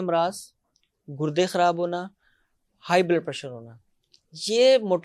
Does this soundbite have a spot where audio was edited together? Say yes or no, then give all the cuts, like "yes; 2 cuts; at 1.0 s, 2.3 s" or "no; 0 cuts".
no; 0 cuts